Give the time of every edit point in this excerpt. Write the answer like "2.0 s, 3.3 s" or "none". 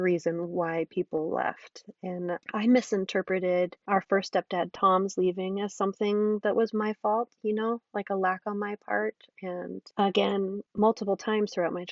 2.4 s, 3.8 s, 9.8 s, 10.6 s